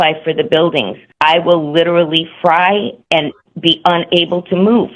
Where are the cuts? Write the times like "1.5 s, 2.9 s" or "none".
1.0 s